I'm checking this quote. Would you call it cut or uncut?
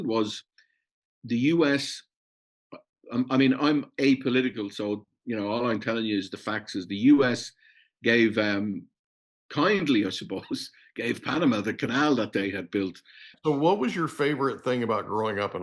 cut